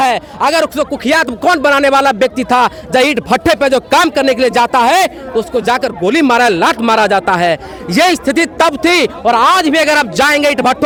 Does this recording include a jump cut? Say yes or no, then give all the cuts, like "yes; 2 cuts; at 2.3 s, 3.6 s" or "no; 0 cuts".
no; 0 cuts